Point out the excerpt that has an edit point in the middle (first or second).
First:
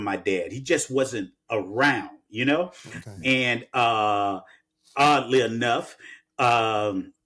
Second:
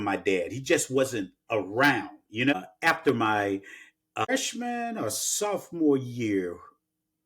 second